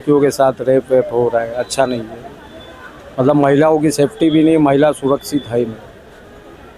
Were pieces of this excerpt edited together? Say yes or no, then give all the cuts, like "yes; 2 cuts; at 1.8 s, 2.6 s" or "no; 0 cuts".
no; 0 cuts